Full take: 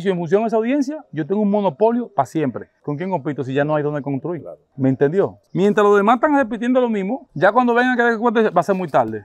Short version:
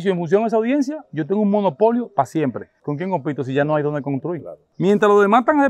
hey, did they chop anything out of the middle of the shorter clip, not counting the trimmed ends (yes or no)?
yes